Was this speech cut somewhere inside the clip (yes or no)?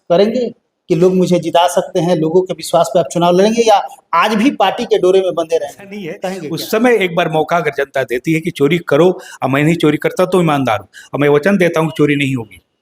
yes